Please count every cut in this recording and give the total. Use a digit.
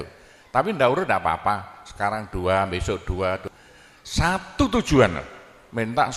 1